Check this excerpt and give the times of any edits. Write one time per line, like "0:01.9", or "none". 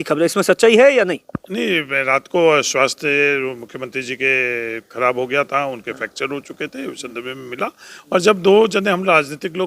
none